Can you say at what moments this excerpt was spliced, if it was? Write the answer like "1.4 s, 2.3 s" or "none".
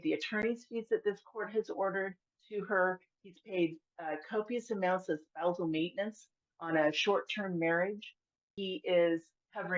2.3 s, 8.5 s